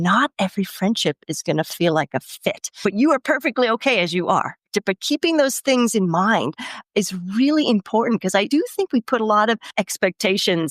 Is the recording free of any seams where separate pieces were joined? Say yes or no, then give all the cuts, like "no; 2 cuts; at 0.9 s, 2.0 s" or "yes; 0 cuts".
no; 2 cuts; at 8.5 s, 9.7 s